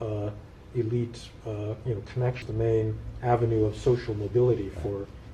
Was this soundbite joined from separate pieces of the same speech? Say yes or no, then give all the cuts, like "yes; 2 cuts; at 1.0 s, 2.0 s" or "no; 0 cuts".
yes; 1 cut; at 2.4 s